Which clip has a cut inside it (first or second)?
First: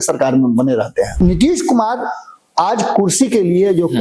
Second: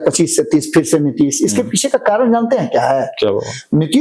first